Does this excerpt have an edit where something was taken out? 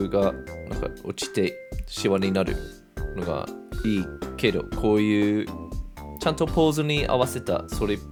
no; 0 cuts

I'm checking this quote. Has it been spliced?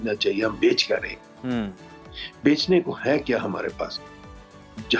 no; 0 cuts

